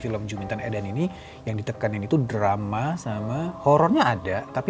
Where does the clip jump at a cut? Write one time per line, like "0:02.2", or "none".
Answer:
none